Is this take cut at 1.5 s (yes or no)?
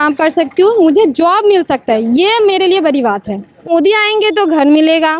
no